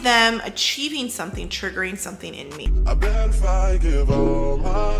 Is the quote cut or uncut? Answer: cut